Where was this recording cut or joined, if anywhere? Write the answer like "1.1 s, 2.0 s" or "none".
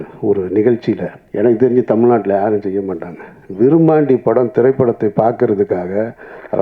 1.2 s